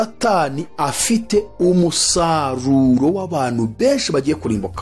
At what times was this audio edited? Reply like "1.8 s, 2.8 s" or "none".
none